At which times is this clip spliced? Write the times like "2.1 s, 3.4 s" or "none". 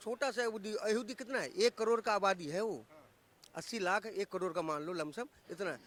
none